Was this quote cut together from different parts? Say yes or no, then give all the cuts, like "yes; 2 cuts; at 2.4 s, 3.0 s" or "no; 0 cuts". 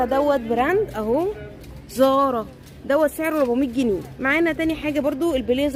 no; 0 cuts